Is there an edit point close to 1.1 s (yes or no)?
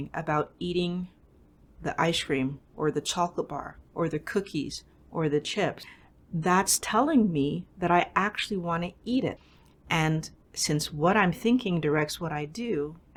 no